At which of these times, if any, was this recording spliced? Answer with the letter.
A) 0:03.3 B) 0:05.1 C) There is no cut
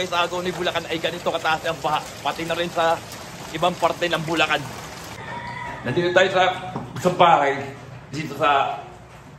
B